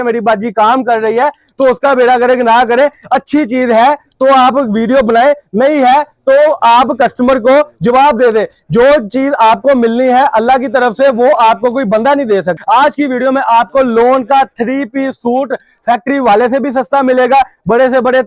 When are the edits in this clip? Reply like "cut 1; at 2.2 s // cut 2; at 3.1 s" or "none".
cut 1; at 12.5 s